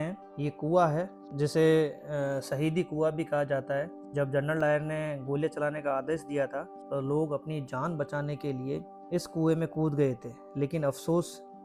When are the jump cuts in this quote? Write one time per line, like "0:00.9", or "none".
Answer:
none